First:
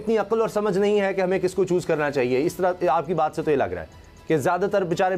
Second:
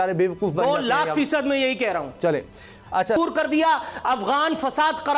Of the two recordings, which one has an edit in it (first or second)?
second